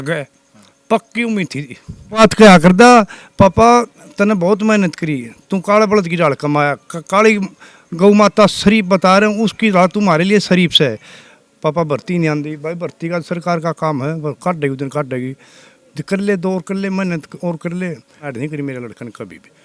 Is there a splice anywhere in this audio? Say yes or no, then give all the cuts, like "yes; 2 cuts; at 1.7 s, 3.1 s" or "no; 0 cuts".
yes; 3 cuts; at 2.2 s, 11.4 s, 18.3 s